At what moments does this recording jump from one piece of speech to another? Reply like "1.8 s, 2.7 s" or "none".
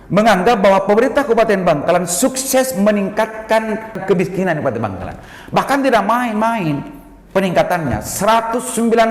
4.0 s

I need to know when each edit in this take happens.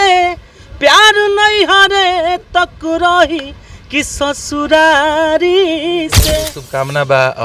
6.3 s

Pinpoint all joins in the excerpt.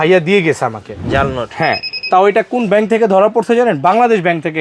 none

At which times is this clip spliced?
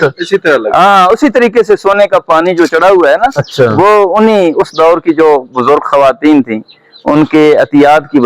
none

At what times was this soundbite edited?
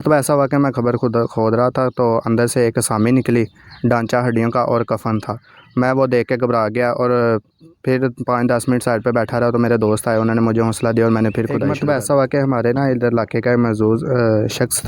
11.7 s

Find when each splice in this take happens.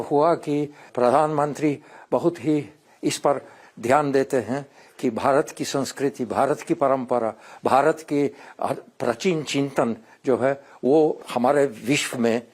0.9 s, 2.8 s, 11.2 s

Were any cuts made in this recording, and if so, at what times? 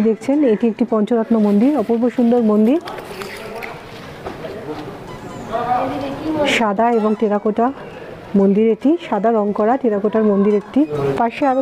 none

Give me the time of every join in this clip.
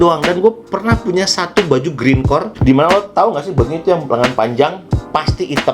2.5 s

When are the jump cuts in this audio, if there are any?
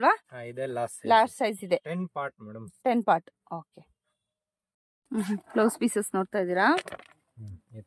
5.2 s

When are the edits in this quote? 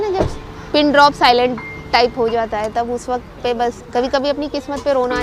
3.8 s

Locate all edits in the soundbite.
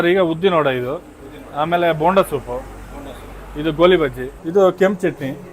4.3 s

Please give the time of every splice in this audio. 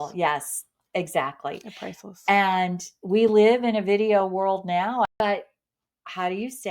5.1 s

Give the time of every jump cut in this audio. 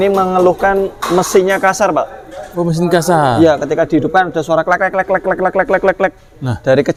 none

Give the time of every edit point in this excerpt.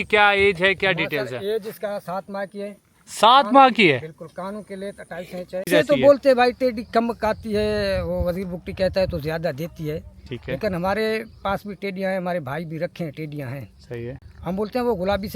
5.7 s

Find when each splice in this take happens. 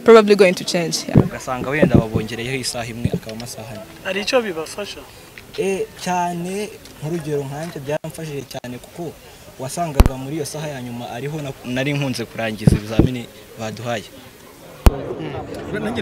none

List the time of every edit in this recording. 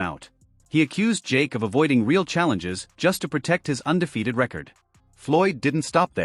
4.7 s

